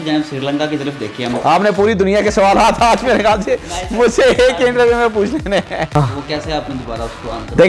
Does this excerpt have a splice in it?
yes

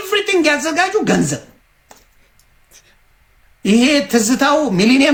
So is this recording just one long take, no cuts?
yes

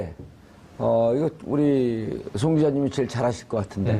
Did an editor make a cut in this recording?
yes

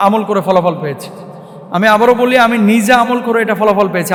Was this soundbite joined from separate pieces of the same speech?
no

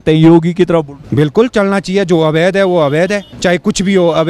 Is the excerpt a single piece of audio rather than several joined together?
no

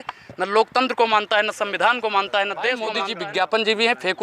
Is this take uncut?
no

